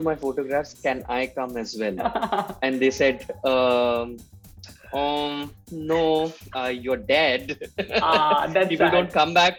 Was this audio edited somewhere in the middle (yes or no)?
no